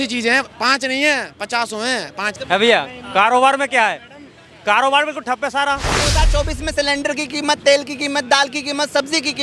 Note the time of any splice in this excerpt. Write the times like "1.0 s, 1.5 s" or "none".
2.3 s, 6.1 s